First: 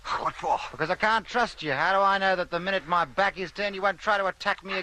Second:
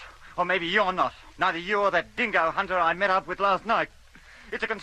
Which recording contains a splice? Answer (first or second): first